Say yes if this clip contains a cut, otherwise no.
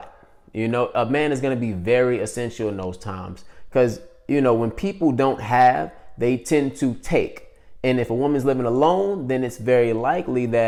no